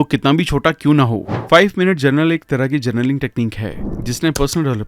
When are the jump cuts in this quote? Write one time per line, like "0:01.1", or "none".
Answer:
0:01.3